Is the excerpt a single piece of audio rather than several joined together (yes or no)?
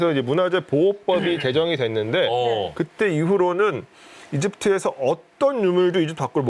yes